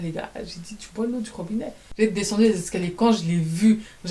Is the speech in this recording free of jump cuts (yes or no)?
no